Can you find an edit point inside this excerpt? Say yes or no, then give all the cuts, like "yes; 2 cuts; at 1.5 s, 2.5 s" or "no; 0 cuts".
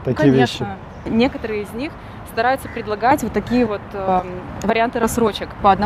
yes; 1 cut; at 1.1 s